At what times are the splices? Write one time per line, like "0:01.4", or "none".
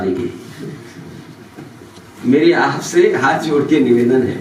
none

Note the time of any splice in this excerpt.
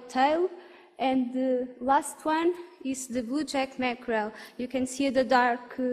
0:02.7

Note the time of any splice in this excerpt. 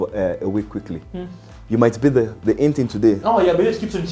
0:03.2

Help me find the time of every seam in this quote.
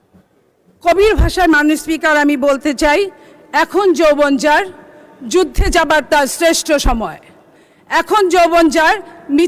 none

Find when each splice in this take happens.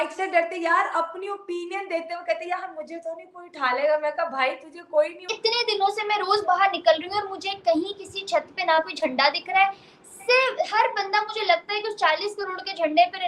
0:05.3

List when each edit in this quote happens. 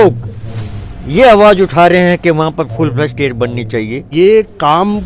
0:04.0

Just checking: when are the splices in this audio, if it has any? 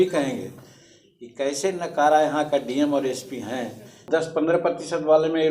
0:04.0

